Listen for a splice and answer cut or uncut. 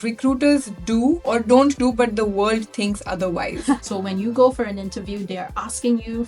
cut